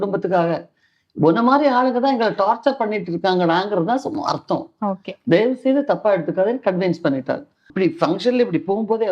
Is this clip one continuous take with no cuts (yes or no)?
no